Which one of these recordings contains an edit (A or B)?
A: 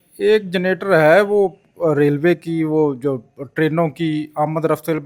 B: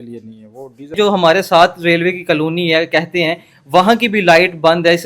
B